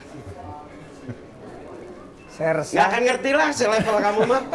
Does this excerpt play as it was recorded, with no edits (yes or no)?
yes